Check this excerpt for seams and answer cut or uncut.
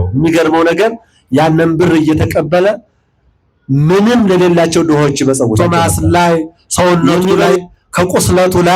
cut